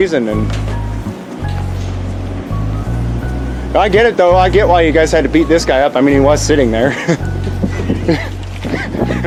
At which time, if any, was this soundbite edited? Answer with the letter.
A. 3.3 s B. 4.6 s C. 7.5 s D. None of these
D